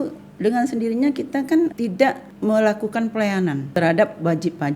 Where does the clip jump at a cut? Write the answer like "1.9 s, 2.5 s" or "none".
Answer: 1.7 s, 3.7 s